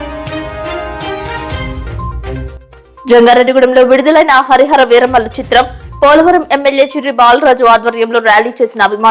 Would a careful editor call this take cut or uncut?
cut